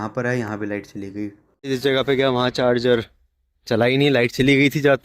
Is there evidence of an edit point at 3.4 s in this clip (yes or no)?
no